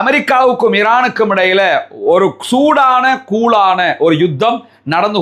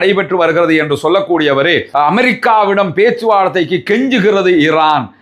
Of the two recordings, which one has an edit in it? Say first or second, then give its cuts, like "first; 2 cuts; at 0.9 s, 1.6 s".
second; 1 cut; at 1.9 s